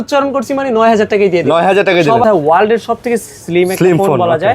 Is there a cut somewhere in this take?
yes; 1 cut; at 2.2 s

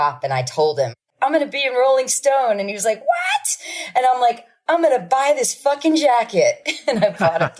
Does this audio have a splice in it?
yes; 1 cut; at 1.0 s

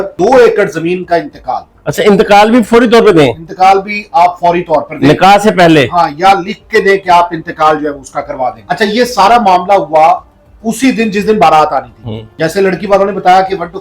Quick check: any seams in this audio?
no; 0 cuts

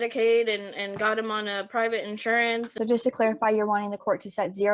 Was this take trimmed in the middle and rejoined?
yes; 1 cut; at 2.7 s

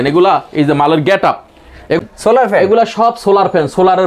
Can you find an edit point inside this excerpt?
yes; 1 cut; at 2.0 s

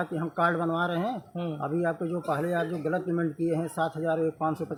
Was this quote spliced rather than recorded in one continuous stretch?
no; 0 cuts

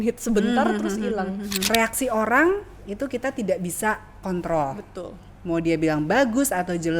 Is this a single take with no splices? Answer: no; 1 cut; at 1.7 s

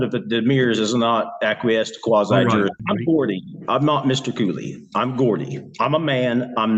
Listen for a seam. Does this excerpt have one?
yes; 1 cut; at 2.8 s

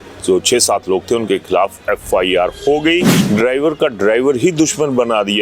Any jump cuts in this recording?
yes; 1 cut; at 3.1 s

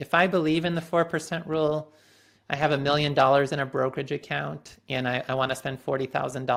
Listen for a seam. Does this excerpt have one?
no; 0 cuts

